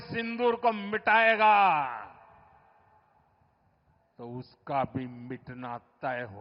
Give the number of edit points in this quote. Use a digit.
0